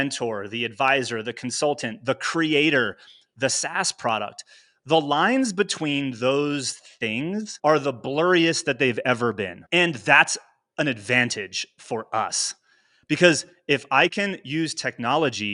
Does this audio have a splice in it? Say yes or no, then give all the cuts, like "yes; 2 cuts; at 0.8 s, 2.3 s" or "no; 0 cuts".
no; 0 cuts